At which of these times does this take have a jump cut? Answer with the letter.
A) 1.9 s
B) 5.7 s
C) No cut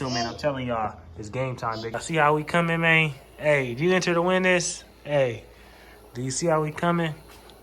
A